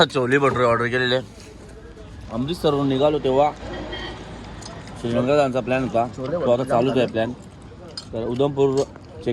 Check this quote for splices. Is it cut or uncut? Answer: uncut